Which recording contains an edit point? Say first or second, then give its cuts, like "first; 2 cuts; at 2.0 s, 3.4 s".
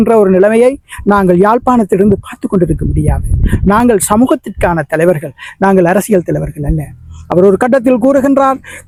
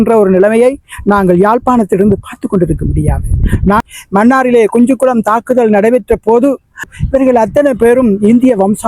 second; 2 cuts; at 3.8 s, 6.9 s